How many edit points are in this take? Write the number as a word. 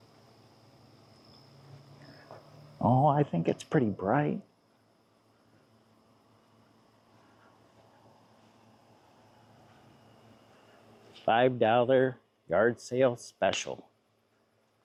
zero